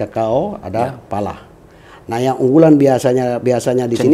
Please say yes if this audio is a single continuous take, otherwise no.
yes